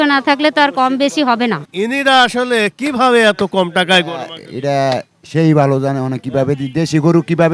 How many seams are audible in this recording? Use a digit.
1